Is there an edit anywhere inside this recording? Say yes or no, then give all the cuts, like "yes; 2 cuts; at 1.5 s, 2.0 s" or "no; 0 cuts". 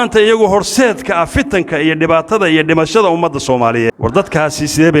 yes; 1 cut; at 3.9 s